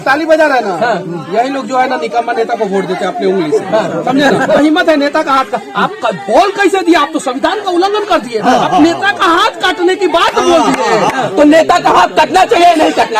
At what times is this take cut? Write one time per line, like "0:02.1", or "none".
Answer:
0:04.6
0:11.3